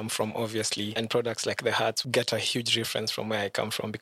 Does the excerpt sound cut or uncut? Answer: cut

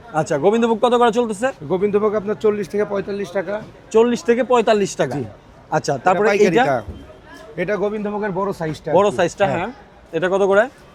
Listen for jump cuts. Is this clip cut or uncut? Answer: uncut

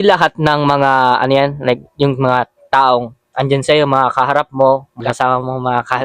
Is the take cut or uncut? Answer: cut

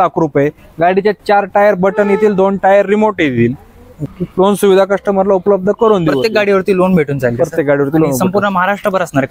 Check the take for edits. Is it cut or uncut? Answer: cut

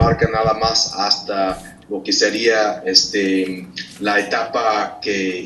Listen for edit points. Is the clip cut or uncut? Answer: cut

